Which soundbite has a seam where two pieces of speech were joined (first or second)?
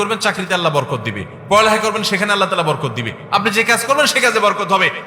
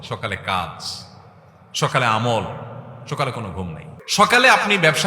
second